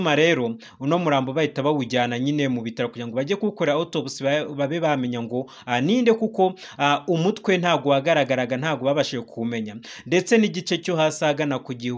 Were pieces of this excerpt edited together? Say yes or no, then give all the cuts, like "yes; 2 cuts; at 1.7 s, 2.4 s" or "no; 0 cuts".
no; 0 cuts